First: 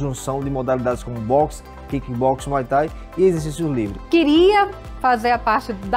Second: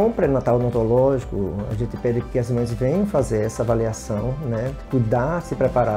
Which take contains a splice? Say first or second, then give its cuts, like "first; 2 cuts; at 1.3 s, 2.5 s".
first; 1 cut; at 4.0 s